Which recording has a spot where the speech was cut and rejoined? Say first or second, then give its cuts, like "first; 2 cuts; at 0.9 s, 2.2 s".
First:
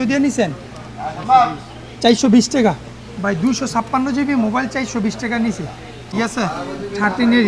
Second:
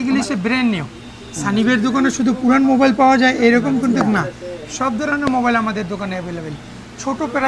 first; 1 cut; at 6.1 s